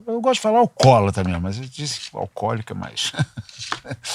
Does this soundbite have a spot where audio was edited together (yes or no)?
no